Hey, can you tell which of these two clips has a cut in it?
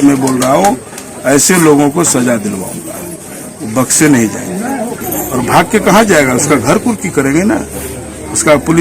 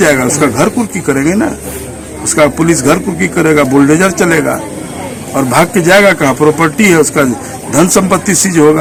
first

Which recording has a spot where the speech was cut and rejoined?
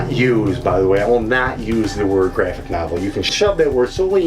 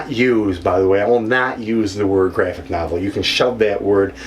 first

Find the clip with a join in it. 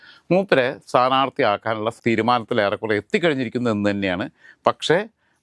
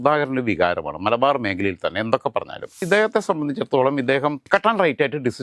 second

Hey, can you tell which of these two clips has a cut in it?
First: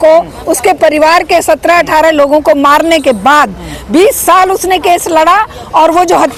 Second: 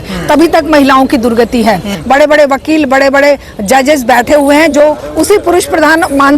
second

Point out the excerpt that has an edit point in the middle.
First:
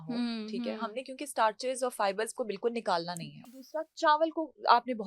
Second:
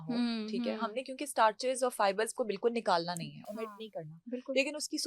first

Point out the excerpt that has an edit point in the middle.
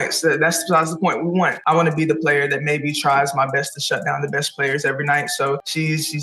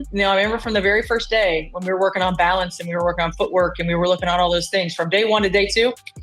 first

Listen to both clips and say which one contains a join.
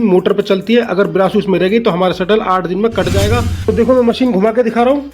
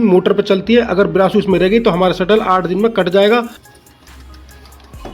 first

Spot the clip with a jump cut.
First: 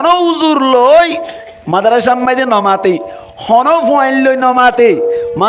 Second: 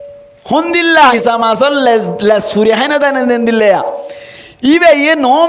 second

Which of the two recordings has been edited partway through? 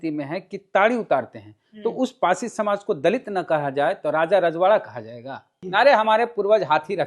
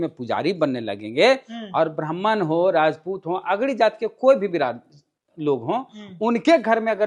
first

